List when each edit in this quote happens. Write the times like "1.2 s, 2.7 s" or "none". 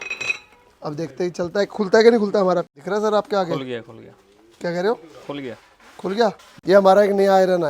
2.7 s, 6.5 s

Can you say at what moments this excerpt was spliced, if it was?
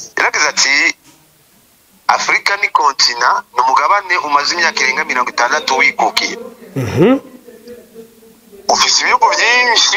none

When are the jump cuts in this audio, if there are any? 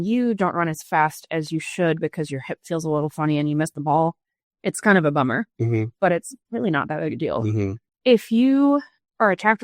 7.8 s

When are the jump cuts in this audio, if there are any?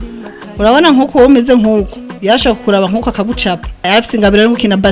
3.9 s

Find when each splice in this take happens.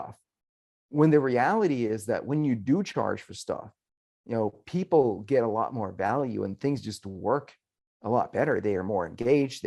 none

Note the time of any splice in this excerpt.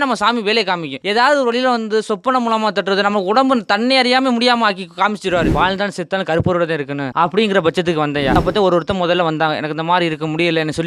0.9 s, 5.5 s, 7.1 s, 8.4 s

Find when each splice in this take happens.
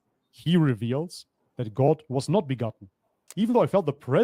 3.2 s

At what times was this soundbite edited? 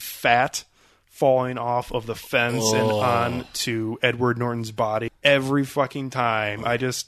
5.1 s

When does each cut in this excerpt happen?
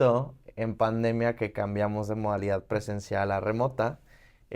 none

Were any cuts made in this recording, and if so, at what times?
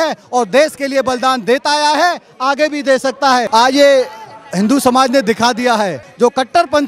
3.5 s, 6.0 s

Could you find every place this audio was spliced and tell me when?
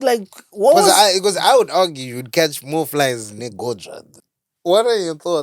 4.1 s

